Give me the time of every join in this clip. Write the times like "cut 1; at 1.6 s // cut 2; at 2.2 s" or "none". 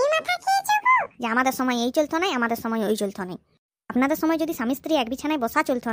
cut 1; at 1.1 s

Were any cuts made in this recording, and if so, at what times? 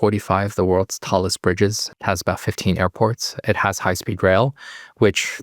cut 1; at 1.8 s

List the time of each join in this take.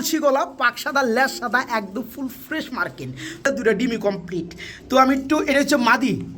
cut 1; at 3.5 s

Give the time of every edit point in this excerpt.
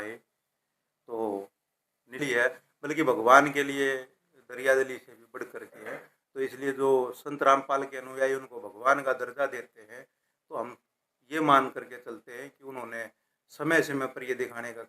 cut 1; at 2.2 s

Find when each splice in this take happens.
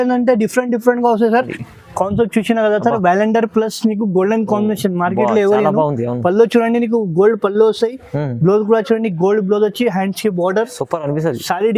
cut 1; at 1.6 s

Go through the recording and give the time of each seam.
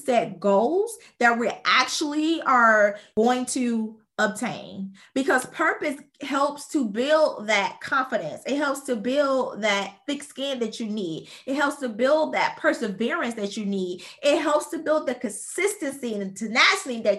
cut 1; at 3.1 s

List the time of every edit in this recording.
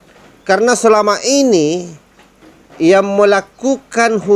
none

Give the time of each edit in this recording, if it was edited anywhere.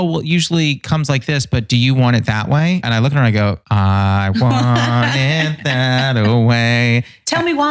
cut 1; at 2.8 s // cut 2; at 3.6 s

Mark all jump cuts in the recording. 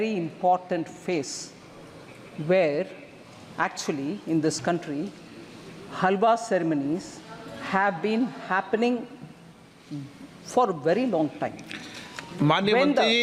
none

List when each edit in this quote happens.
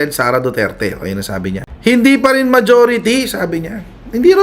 cut 1; at 1.7 s

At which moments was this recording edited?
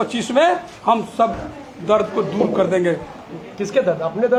none

